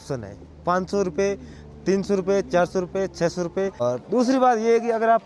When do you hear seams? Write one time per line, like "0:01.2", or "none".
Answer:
0:03.8

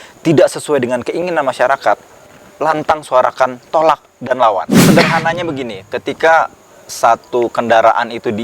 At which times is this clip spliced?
0:04.7

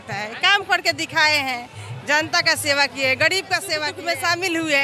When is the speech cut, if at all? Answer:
0:03.9

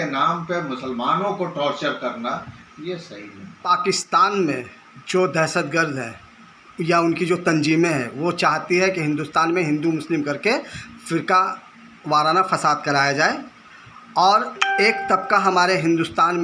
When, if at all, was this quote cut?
0:03.7

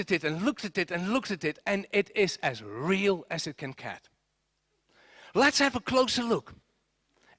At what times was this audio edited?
none

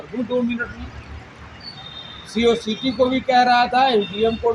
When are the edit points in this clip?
none

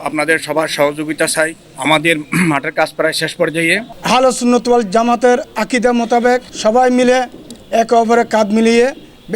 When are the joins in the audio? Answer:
0:01.7
0:03.9

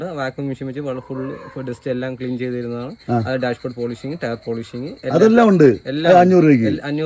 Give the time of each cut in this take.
none

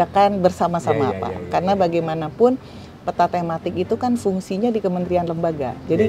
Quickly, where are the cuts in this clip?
none

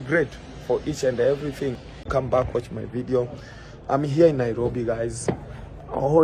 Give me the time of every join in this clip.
0:01.9

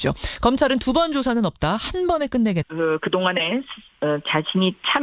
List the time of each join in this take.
none

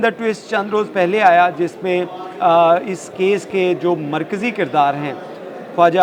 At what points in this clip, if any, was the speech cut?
none

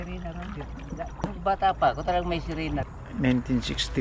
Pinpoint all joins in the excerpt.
0:01.4
0:02.9

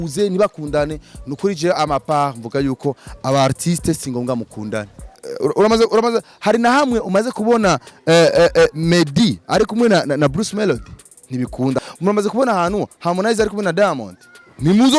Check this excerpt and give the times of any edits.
0:05.2
0:11.8

